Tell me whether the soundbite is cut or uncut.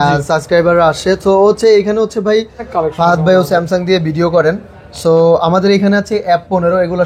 cut